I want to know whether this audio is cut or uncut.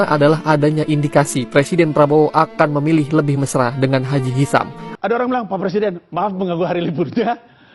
cut